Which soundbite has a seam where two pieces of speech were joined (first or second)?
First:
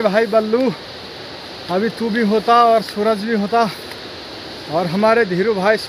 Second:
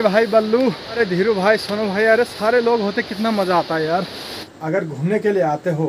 second